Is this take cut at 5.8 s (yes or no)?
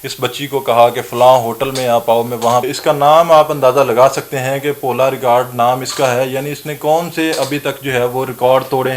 no